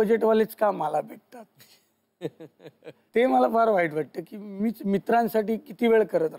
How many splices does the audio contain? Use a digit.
1